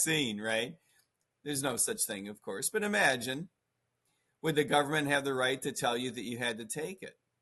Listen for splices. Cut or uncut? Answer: uncut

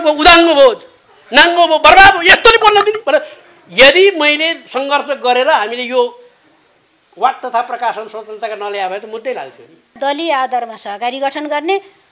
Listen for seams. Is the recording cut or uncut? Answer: cut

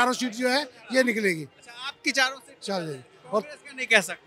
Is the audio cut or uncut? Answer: uncut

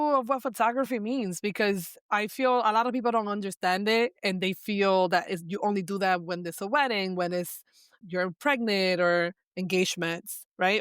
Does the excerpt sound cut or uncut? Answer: cut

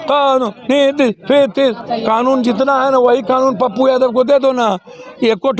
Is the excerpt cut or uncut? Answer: cut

